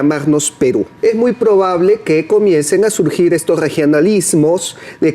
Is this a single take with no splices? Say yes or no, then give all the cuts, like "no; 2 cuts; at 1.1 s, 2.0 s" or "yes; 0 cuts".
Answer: no; 1 cut; at 0.9 s